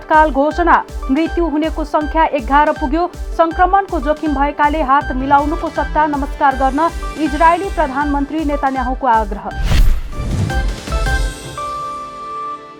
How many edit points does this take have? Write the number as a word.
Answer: zero